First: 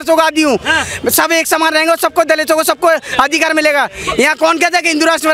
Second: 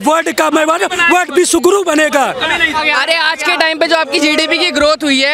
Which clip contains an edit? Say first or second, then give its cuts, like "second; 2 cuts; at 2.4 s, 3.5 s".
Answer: second; 1 cut; at 2.8 s